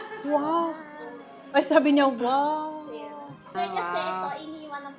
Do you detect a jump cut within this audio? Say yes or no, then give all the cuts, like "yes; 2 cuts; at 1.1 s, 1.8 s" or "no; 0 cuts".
yes; 1 cut; at 3.5 s